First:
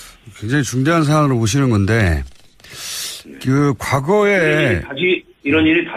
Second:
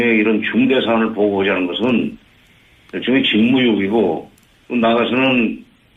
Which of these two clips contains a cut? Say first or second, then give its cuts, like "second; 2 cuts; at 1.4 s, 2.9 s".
second; 1 cut; at 1.0 s